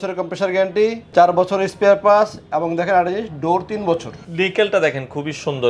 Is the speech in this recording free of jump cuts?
no; 2 cuts; at 1.0 s, 4.2 s

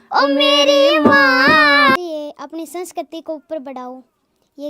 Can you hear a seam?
yes; 1 cut; at 2.0 s

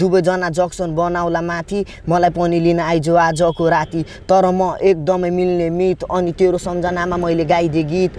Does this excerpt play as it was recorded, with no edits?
yes; 0 cuts

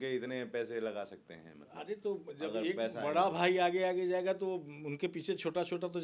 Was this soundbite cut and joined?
no; 0 cuts

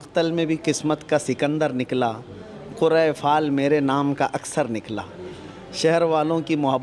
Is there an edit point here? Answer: no; 0 cuts

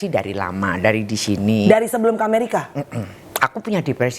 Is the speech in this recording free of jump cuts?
yes; 0 cuts

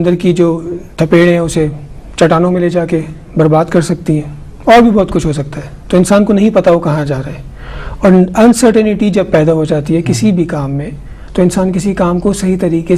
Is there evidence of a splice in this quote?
yes; 1 cut; at 2.7 s

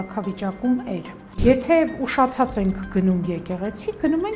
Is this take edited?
yes; 1 cut; at 1.4 s

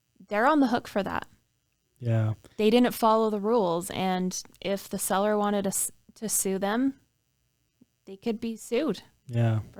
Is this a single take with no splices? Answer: yes; 0 cuts

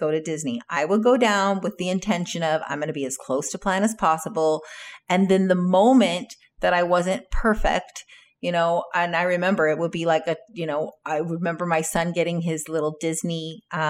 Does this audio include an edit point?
no; 0 cuts

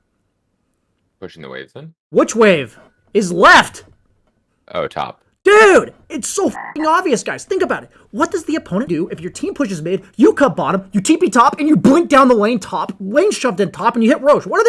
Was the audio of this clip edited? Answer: yes; 1 cut; at 8.9 s

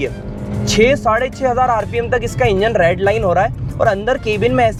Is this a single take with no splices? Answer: yes; 0 cuts

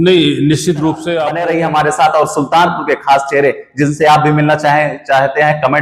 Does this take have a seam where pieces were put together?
yes; 1 cut; at 1.3 s

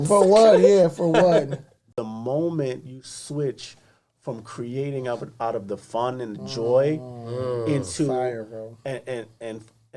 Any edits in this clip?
yes; 1 cut; at 1.9 s

